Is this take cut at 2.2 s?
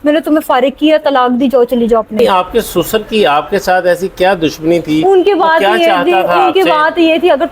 yes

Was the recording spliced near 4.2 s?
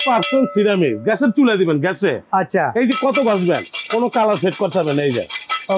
no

